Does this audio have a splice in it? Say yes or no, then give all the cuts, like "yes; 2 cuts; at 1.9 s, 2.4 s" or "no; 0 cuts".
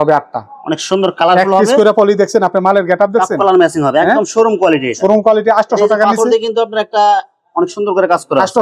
no; 0 cuts